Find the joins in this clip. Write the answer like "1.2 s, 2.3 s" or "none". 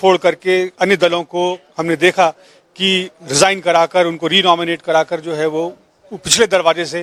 none